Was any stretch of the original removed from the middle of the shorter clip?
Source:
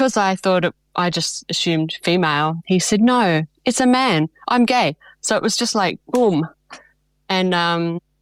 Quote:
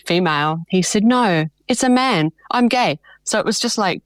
no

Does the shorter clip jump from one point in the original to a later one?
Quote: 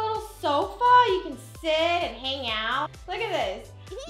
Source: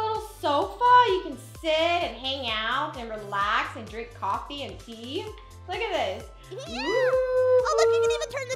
yes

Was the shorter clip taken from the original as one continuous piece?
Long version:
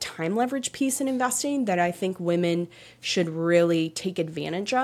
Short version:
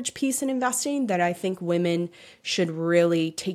yes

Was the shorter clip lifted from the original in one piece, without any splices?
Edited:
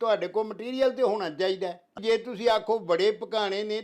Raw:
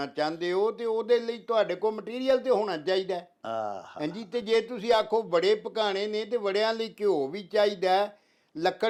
no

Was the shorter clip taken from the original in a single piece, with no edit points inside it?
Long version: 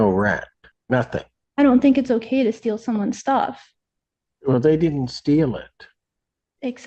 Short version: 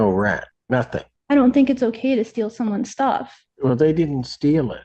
no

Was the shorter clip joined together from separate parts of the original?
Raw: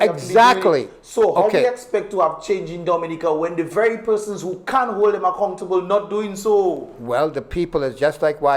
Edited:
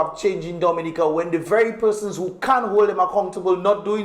no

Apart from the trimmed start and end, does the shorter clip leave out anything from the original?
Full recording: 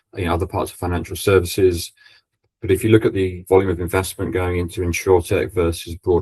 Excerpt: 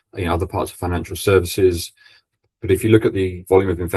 no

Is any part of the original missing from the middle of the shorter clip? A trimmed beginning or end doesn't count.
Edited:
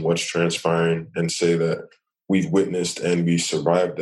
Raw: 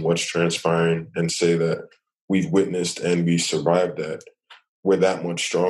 no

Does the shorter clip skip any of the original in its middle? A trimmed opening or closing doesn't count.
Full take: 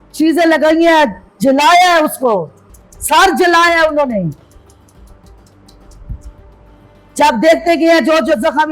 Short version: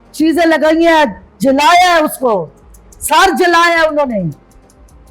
no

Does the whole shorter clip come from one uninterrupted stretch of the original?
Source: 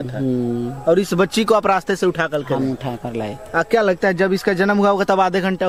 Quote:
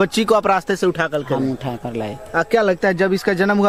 yes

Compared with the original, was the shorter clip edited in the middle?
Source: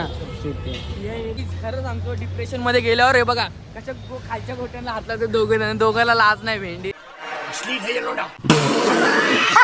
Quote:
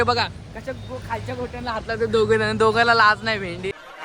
no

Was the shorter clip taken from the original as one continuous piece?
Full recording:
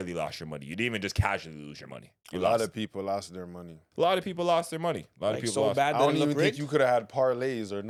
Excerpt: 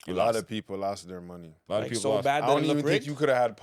no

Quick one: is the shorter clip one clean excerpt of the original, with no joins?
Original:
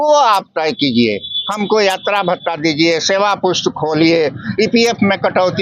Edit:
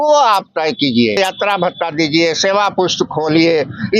no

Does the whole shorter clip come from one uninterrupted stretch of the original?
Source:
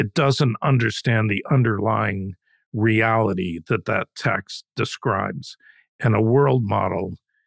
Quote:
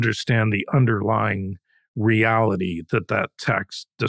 yes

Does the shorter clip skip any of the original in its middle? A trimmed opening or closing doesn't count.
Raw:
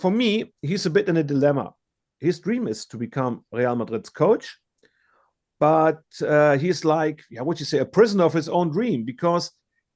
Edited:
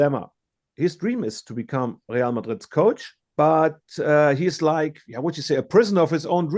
yes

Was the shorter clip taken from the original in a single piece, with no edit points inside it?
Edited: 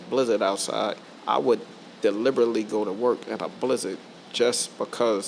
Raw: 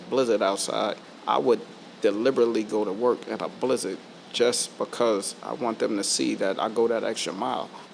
yes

